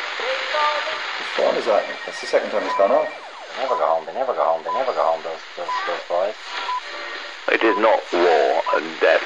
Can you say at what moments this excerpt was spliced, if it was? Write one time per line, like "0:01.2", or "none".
0:07.0